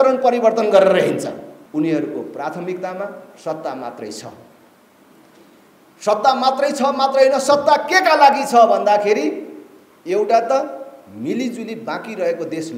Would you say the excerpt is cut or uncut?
cut